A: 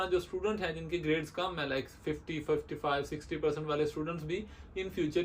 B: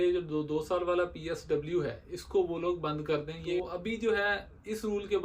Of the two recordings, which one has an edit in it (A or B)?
B